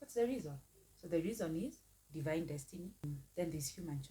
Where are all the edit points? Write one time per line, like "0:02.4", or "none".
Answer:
0:03.0